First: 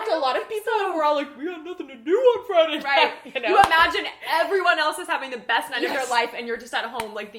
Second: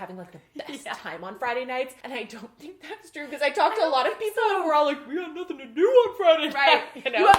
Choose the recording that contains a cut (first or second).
second